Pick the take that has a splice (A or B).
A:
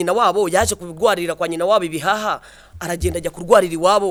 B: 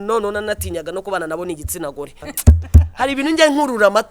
B